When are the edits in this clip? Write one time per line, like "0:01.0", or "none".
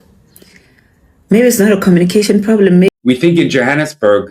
0:02.9